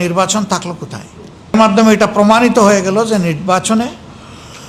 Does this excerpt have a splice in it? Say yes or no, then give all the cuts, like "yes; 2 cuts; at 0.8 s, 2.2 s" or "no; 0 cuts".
yes; 1 cut; at 1.5 s